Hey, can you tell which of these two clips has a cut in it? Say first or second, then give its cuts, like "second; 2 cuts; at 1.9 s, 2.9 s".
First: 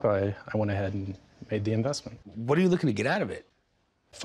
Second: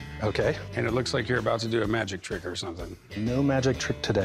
first; 1 cut; at 2.1 s